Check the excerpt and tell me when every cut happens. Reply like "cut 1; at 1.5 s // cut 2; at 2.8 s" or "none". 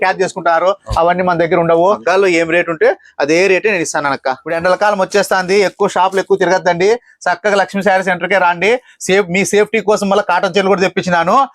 cut 1; at 2.0 s // cut 2; at 4.5 s

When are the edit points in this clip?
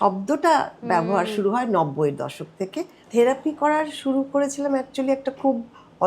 cut 1; at 3.0 s

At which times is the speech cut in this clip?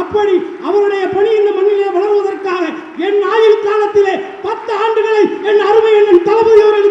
none

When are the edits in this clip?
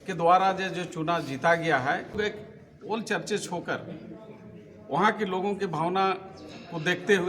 cut 1; at 2.2 s

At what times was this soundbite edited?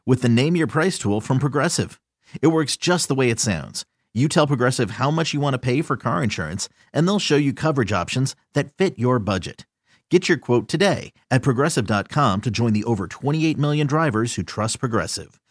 none

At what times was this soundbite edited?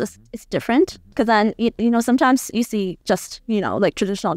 cut 1; at 1.0 s

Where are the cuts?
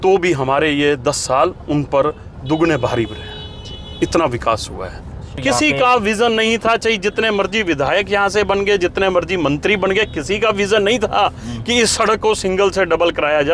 cut 1; at 5.4 s

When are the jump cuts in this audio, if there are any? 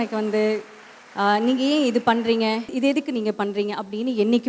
cut 1; at 2.7 s

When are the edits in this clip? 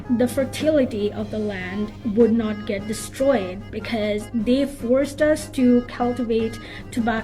none

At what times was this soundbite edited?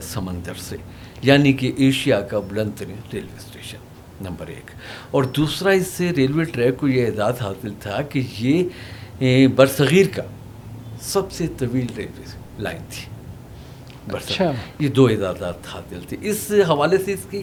none

